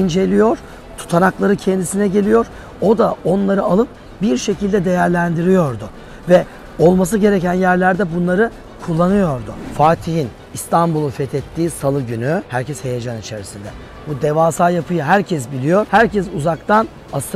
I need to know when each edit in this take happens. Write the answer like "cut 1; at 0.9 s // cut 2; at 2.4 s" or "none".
cut 1; at 9.6 s // cut 2; at 12.5 s // cut 3; at 15.9 s